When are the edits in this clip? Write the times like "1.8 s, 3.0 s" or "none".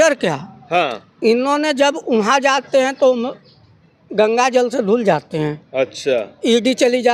none